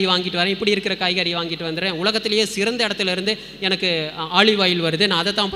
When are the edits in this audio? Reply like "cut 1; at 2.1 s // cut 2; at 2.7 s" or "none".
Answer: none